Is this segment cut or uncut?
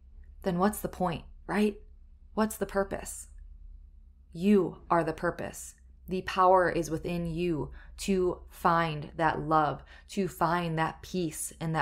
uncut